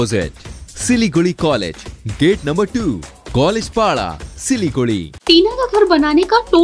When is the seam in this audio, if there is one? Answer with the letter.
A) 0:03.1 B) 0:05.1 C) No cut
B